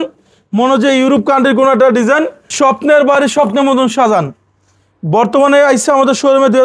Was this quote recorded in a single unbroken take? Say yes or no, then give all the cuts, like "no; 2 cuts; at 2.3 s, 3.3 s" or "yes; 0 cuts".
no; 1 cut; at 2.4 s